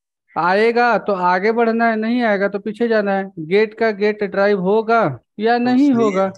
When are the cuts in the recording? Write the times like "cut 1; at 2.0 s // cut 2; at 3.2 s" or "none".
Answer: none